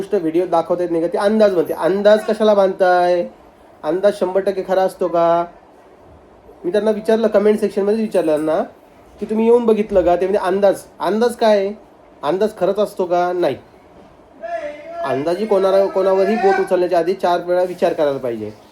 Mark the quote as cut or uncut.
uncut